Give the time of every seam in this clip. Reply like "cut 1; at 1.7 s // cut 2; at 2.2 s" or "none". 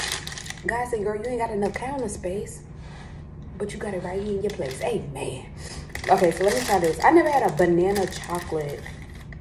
none